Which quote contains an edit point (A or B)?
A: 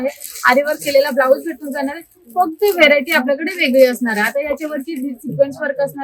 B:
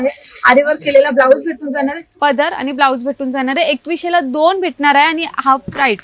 B